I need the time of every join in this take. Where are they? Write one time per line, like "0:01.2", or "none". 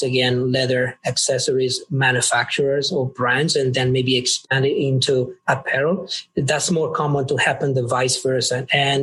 none